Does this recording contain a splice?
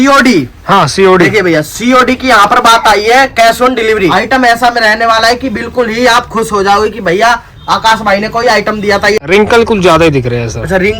yes; 2 cuts; at 4.1 s, 9.2 s

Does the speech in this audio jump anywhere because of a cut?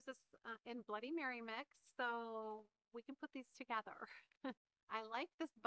yes; 1 cut; at 4.7 s

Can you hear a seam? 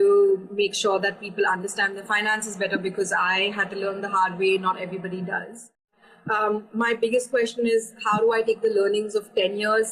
yes; 1 cut; at 5.9 s

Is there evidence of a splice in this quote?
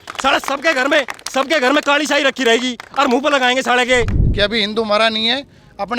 yes; 1 cut; at 4.2 s

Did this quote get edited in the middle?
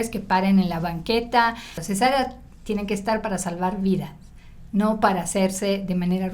yes; 1 cut; at 1.8 s

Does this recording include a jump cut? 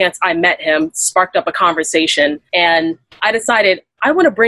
yes; 1 cut; at 2.4 s

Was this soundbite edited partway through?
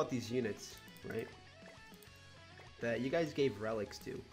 yes; 2 cuts; at 1.4 s, 2.8 s

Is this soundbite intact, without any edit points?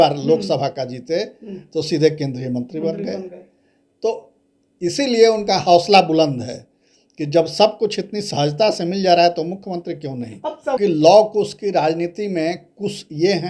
no; 1 cut; at 10.8 s

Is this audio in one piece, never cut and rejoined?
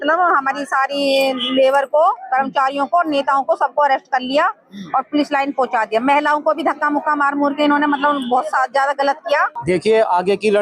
no; 1 cut; at 9.5 s

